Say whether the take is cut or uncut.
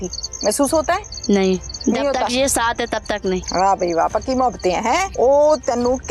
cut